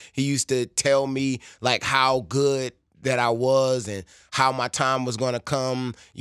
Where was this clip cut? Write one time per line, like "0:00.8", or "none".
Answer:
none